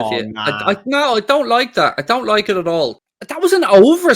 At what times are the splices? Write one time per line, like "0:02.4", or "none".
0:03.0